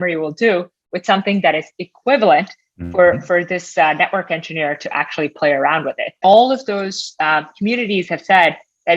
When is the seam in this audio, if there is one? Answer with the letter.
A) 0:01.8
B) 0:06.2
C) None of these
B